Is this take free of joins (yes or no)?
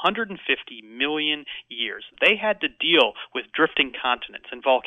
no